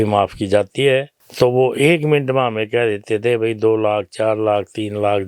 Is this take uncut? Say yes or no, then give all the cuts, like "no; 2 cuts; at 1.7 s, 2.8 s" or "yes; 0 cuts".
no; 1 cut; at 1.2 s